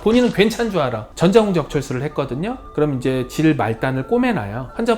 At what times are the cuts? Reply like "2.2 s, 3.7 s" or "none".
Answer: 1.0 s

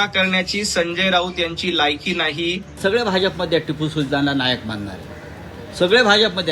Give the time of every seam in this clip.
2.8 s

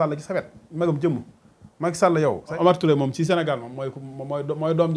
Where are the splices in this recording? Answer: 2.5 s

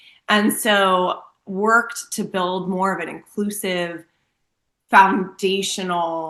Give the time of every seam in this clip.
none

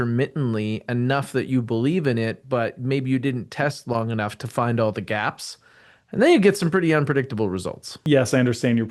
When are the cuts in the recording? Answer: 7.9 s

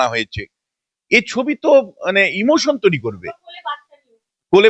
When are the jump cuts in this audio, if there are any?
none

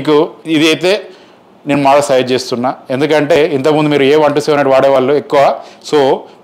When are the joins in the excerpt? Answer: none

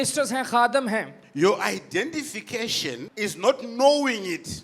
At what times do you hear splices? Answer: 3.1 s

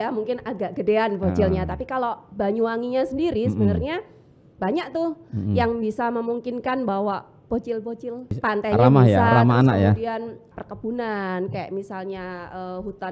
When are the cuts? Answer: 8.3 s, 10.5 s

